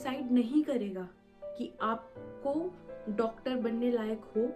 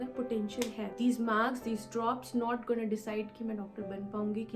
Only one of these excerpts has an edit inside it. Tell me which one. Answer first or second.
second